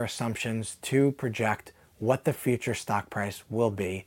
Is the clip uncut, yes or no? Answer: yes